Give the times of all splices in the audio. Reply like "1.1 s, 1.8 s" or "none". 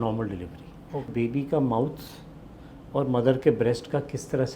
1.1 s